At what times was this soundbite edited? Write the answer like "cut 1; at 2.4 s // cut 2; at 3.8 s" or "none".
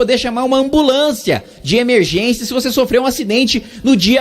none